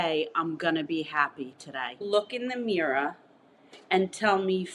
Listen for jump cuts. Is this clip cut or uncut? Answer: cut